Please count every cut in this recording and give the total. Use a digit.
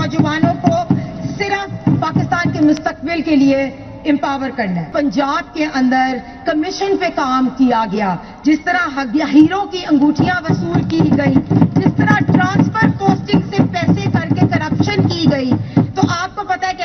1